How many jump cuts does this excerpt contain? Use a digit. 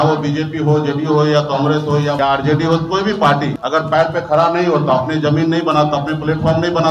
2